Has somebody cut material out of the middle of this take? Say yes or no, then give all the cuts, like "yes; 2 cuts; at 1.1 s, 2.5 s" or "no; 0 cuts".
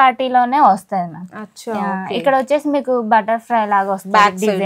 no; 0 cuts